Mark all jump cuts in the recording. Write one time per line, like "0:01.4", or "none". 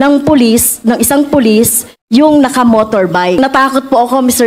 0:03.4

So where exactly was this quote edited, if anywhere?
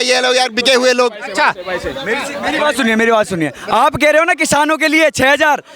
none

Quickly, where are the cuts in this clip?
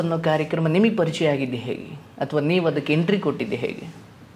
none

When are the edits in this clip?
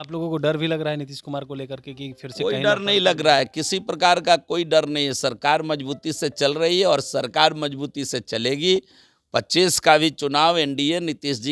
none

